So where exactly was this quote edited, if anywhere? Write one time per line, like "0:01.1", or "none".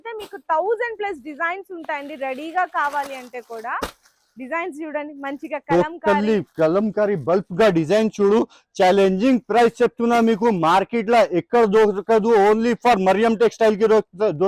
none